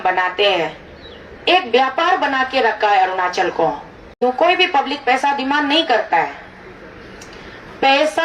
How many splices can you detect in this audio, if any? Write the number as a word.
one